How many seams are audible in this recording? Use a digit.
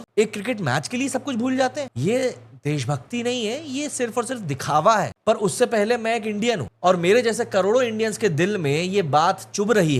1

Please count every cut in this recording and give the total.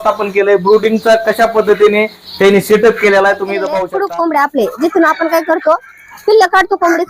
1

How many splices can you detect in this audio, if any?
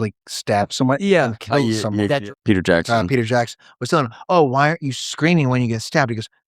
1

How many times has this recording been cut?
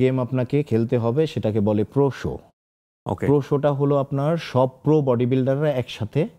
0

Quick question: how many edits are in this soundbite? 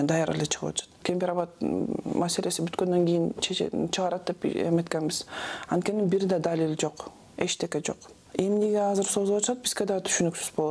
2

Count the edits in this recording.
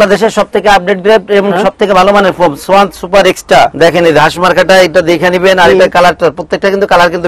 1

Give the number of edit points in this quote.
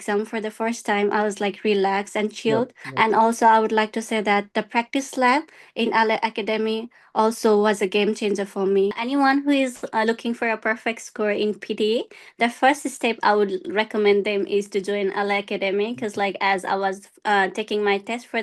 2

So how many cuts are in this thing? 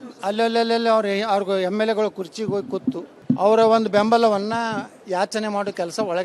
1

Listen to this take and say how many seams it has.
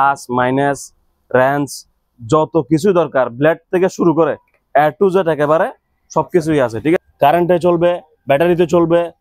1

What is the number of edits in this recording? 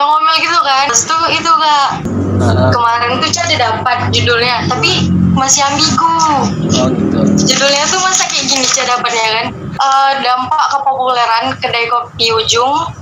3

